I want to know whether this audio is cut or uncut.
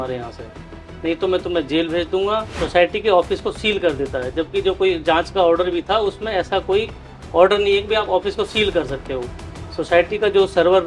cut